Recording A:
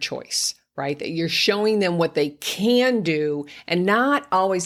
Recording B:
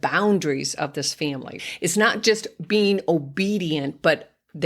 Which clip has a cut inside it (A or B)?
B